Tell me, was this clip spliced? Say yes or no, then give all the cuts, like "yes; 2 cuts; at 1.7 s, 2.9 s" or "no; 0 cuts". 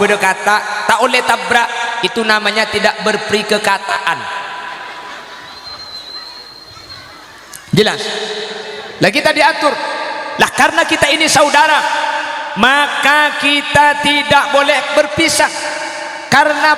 no; 0 cuts